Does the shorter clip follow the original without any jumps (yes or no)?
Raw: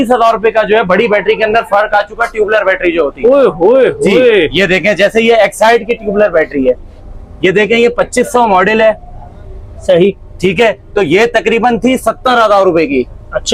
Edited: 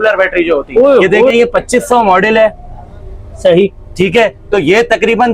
no